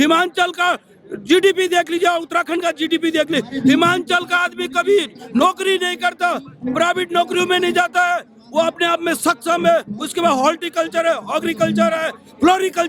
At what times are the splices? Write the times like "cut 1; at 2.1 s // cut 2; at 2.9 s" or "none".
none